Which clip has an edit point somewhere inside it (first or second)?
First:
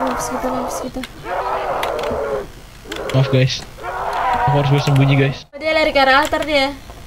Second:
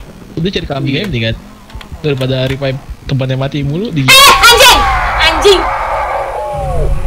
first